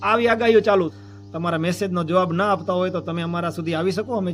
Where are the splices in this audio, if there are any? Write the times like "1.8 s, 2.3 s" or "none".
1.0 s